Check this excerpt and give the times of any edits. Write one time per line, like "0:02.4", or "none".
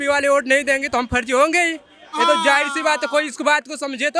none